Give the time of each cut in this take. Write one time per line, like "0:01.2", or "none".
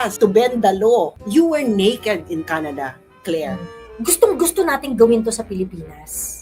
0:01.1
0:03.7